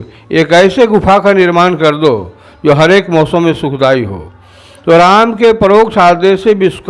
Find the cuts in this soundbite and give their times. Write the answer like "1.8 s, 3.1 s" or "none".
none

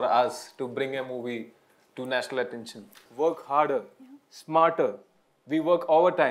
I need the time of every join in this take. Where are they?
3.0 s

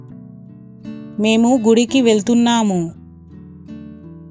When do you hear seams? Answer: none

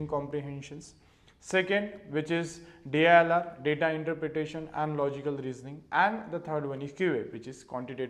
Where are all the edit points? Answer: none

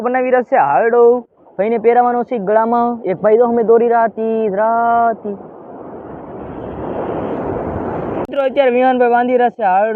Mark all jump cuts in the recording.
8.3 s

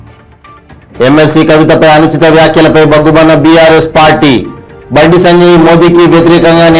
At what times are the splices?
none

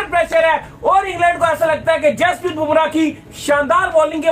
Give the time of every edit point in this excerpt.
none

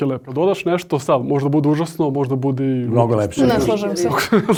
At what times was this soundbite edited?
none

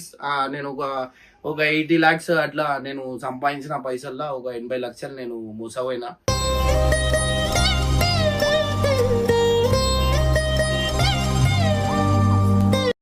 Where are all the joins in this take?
none

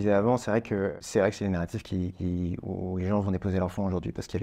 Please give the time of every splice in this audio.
1.0 s

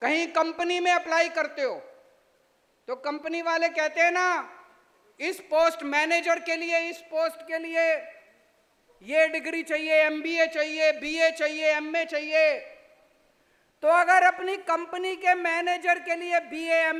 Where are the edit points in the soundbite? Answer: none

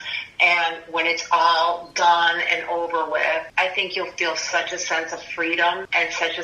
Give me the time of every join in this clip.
none

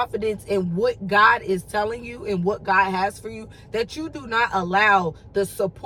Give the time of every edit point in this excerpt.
none

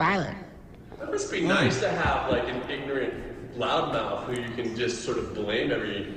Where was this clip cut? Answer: none

